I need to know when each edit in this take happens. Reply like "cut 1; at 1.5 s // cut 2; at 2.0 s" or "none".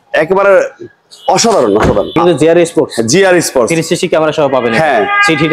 cut 1; at 2.2 s